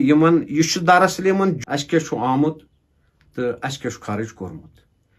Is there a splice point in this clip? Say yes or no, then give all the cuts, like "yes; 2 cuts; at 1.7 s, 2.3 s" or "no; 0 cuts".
yes; 1 cut; at 1.6 s